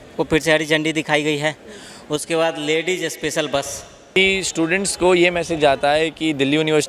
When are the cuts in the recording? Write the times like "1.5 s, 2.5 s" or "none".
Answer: 4.2 s